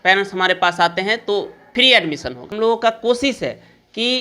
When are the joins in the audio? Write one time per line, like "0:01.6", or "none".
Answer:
0:01.6
0:02.4

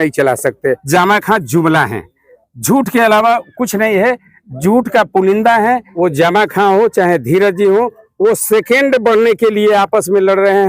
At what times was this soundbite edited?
0:00.8
0:05.9

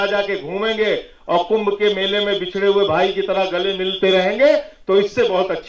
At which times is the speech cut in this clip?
none

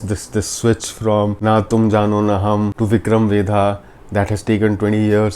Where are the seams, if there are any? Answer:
0:01.4
0:02.8

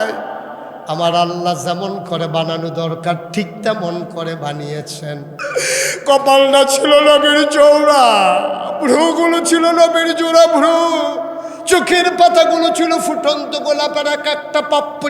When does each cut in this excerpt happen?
0:05.3

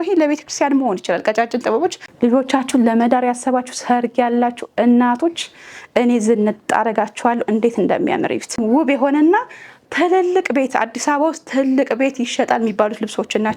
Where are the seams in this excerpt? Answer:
0:02.0
0:08.6

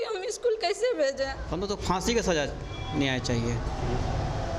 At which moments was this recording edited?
0:01.4

